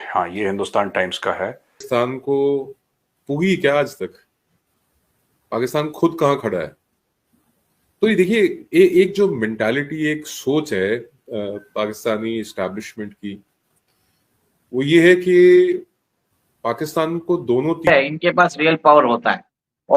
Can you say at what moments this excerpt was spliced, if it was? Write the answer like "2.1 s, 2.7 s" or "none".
1.8 s, 17.9 s